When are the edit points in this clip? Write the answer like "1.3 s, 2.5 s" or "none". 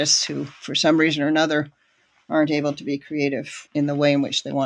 none